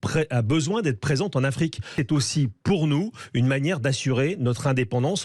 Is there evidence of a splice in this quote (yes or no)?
yes